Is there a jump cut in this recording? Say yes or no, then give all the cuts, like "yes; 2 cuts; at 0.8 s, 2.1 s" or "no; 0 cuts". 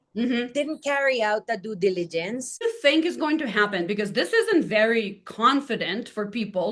yes; 1 cut; at 2.6 s